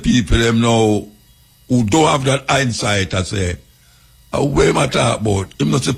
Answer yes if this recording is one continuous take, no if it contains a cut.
yes